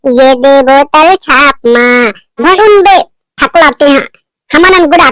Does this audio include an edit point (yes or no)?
yes